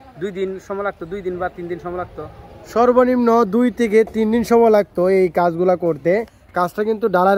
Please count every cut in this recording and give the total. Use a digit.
1